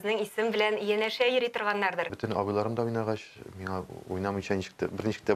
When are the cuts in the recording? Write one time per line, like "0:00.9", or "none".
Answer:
0:02.2